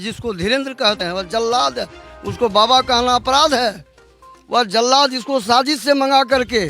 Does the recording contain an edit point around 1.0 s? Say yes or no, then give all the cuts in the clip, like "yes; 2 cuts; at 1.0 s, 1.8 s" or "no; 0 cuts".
yes; 1 cut; at 1.0 s